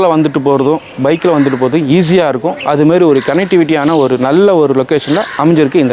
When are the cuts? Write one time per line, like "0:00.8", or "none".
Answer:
none

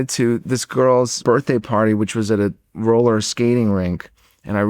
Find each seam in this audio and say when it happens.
0:01.2

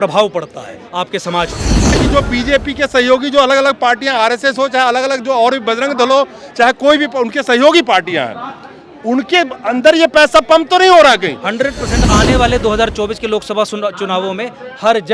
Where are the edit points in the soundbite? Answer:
0:02.0
0:12.0

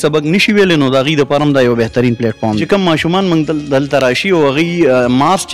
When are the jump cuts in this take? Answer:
0:02.6

